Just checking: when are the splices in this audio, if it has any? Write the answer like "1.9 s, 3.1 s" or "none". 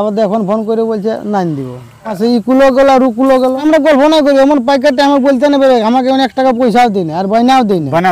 2.1 s, 3.6 s